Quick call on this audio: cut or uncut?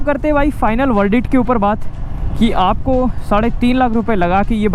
uncut